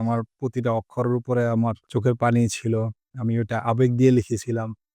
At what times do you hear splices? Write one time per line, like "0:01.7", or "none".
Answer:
0:01.8